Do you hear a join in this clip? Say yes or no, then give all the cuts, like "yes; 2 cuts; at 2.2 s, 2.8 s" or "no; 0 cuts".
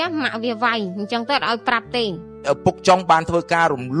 yes; 1 cut; at 2.4 s